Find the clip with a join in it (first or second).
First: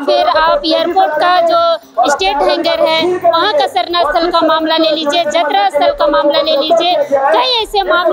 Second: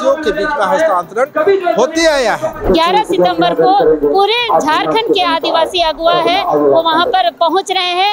second